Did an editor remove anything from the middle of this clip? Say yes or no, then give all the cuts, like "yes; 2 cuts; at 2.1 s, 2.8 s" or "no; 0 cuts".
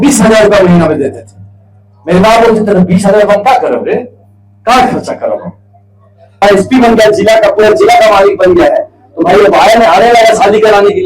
yes; 1 cut; at 6.4 s